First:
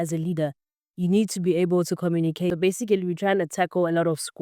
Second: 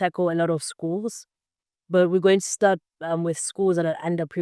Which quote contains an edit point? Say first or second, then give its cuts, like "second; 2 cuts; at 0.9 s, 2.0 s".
first; 1 cut; at 2.5 s